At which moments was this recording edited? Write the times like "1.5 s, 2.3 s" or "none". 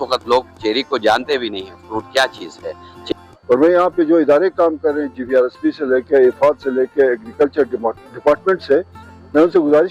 3.0 s